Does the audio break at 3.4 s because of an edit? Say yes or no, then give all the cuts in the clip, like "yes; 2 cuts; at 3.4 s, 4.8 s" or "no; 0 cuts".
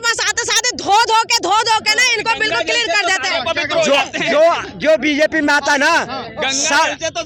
no; 0 cuts